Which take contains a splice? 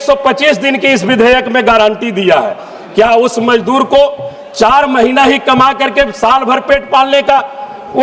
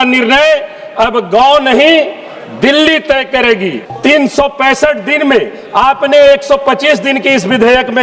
second; 1 cut; at 3.8 s

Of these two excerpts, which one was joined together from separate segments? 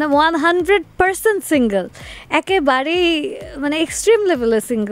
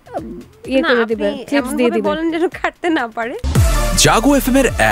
second; 1 cut; at 3.4 s

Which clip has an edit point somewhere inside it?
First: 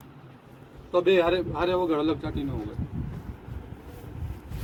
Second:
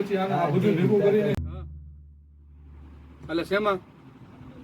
second; 1 cut; at 1.3 s

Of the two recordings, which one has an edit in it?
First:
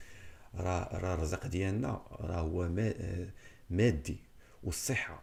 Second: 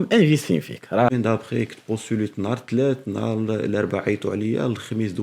second; 1 cut; at 1.1 s

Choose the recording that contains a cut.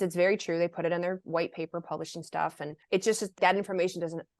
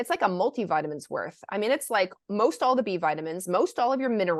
first; 1 cut; at 3.4 s

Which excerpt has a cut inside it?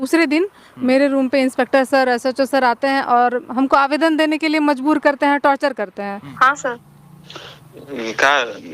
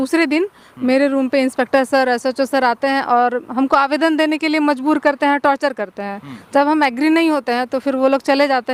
first; 1 cut; at 6.3 s

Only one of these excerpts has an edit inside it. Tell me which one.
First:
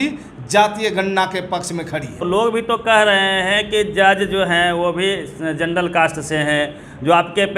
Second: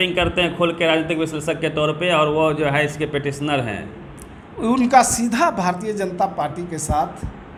first; 1 cut; at 2.2 s

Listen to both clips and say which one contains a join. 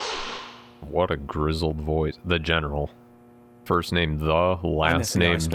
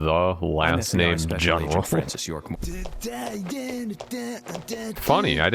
second; 1 cut; at 3.0 s

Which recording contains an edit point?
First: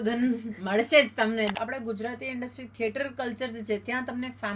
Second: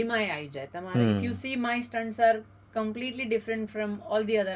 first; 1 cut; at 1.5 s

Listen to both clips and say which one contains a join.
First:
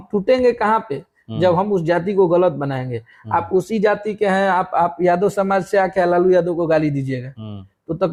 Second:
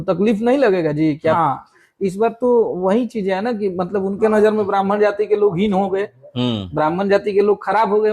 second; 1 cut; at 1.4 s

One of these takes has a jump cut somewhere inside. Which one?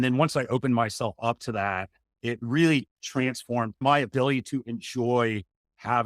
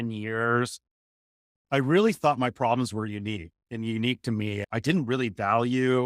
first; 1 cut; at 3.8 s

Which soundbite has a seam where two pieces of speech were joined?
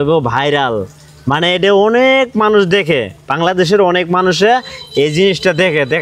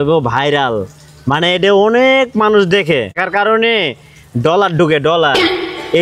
second; 1 cut; at 3.2 s

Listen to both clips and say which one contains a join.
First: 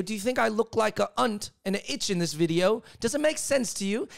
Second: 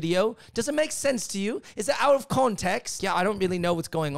second; 1 cut; at 3.0 s

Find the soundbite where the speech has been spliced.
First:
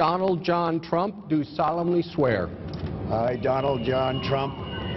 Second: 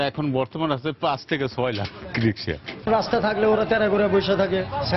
second; 1 cut; at 2.7 s

